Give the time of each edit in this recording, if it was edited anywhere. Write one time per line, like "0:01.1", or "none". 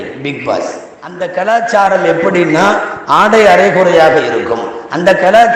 0:01.2